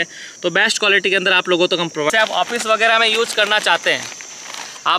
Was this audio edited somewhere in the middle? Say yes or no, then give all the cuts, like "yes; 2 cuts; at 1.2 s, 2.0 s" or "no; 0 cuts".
yes; 1 cut; at 2.1 s